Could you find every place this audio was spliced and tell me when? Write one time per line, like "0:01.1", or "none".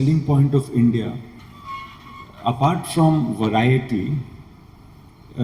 none